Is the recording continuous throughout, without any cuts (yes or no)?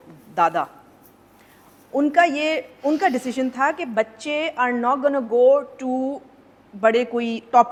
yes